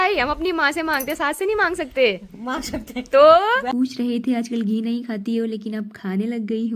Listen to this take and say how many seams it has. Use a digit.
1